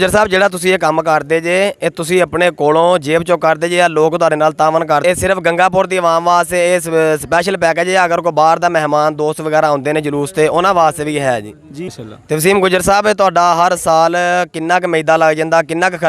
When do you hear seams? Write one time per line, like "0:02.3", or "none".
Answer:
0:05.0
0:11.8

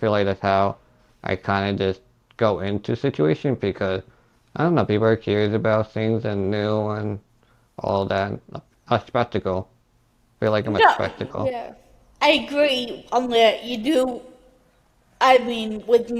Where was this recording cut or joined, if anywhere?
none

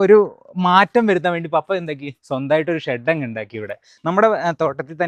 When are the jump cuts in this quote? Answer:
none

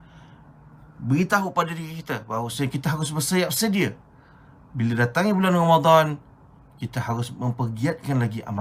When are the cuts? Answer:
none

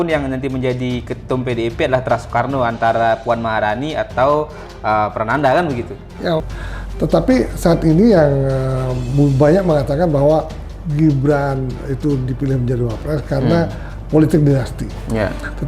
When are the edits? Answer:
0:06.5

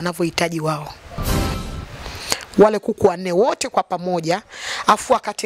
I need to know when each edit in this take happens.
0:01.5

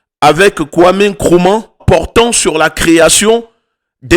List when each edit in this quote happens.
0:01.8

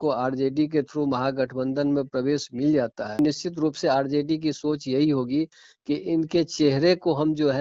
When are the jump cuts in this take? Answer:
0:03.2

